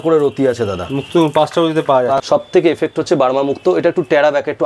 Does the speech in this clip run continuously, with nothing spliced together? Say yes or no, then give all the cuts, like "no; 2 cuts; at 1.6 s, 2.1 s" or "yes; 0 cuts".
no; 1 cut; at 2.2 s